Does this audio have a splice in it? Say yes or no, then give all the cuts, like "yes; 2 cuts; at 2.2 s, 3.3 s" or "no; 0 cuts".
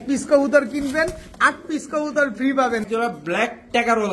yes; 1 cut; at 2.8 s